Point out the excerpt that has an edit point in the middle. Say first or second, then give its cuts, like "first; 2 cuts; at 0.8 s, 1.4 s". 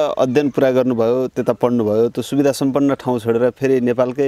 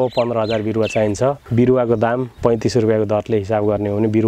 second; 2 cuts; at 1.4 s, 2.3 s